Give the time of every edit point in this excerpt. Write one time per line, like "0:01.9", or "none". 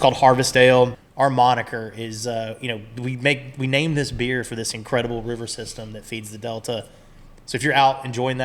0:01.0